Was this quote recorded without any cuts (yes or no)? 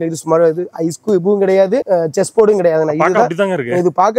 no